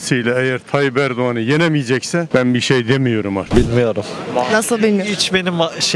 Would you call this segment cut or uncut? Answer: cut